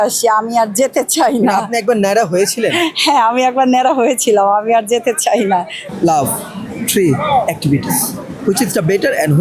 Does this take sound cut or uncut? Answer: cut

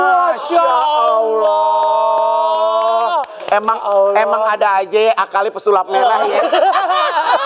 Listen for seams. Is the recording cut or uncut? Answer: uncut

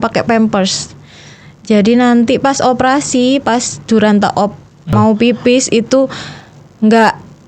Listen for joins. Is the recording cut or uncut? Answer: cut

